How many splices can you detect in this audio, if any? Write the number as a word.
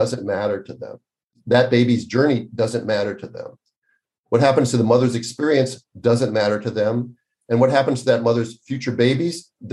one